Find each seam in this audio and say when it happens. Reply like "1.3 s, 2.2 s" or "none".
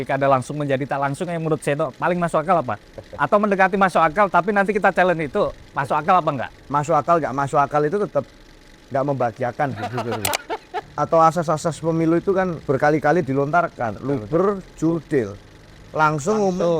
10.9 s